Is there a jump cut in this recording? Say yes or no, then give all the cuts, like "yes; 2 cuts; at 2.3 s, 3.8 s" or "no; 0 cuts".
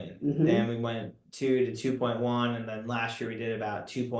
no; 0 cuts